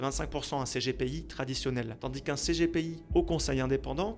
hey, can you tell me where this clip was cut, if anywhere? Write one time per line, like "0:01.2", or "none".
0:01.9
0:03.0